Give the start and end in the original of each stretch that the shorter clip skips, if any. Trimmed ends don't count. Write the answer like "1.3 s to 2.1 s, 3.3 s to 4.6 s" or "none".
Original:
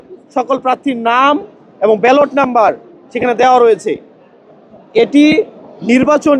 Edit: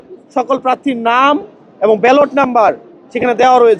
none